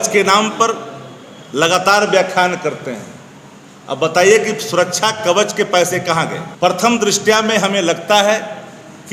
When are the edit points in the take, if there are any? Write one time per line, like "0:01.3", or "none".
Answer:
0:06.4